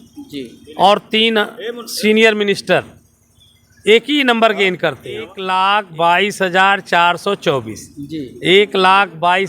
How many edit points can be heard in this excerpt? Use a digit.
1